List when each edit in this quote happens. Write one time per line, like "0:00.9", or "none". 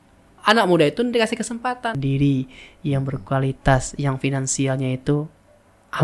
0:02.0